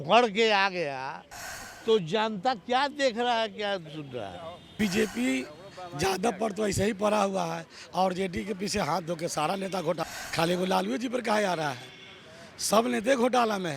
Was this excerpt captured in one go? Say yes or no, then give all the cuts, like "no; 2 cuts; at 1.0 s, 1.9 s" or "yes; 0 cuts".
no; 2 cuts; at 4.8 s, 10.0 s